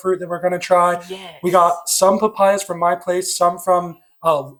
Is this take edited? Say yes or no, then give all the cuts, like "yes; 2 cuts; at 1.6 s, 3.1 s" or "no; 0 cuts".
no; 0 cuts